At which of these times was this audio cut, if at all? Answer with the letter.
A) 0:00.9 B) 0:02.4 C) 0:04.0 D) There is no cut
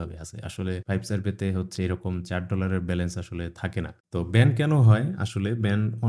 C